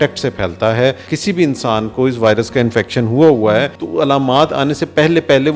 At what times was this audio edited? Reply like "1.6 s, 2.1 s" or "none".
1.1 s, 3.8 s